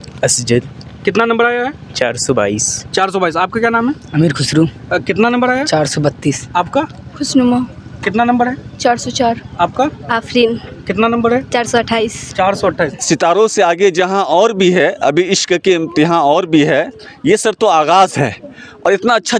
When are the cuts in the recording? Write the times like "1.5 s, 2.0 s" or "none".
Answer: 12.8 s